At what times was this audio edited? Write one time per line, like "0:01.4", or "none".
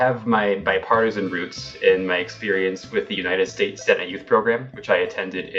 none

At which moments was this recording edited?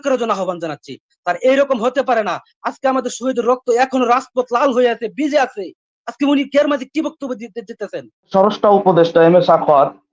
0:08.3

